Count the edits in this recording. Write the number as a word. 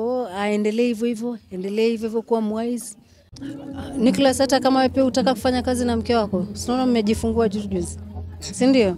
one